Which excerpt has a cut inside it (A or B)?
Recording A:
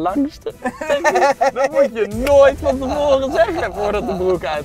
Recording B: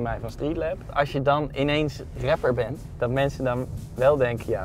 B